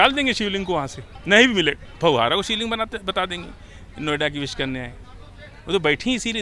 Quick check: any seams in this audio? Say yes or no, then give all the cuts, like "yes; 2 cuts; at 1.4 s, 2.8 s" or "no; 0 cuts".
no; 0 cuts